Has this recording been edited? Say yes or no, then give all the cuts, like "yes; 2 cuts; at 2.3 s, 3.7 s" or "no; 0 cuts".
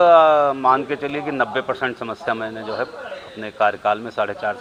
no; 0 cuts